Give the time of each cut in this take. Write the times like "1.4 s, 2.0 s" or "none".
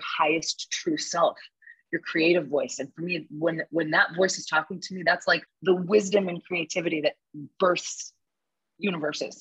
5.5 s